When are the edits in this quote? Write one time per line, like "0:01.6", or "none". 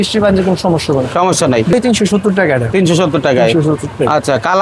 0:01.7